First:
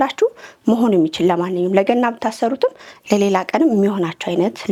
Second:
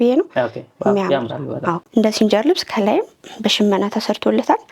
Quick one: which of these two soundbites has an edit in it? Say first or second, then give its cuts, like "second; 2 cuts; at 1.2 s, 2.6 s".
second; 1 cut; at 1.8 s